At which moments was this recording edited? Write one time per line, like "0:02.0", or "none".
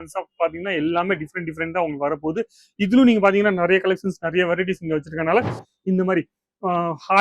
0:05.6